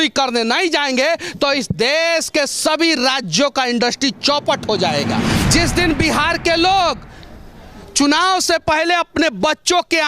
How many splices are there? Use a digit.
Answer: 1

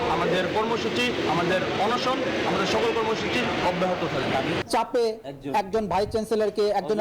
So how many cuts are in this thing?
1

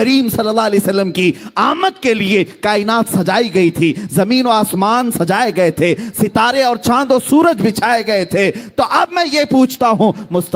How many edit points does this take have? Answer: 0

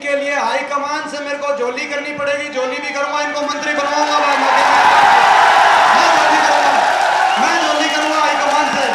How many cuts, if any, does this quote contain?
0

